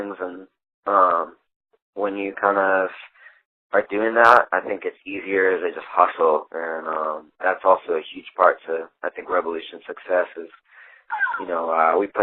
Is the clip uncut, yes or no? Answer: yes